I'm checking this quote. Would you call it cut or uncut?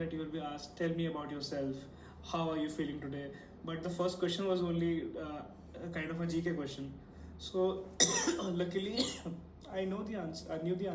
uncut